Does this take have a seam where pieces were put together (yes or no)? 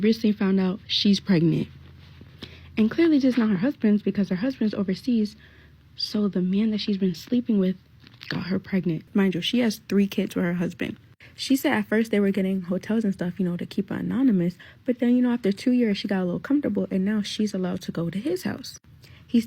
yes